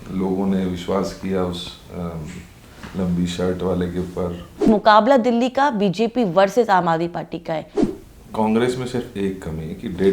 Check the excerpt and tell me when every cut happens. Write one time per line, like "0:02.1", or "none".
0:04.7
0:07.7